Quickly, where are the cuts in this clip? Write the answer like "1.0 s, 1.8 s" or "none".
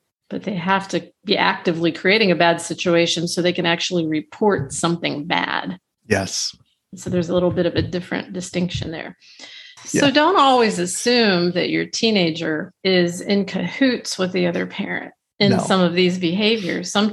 9.7 s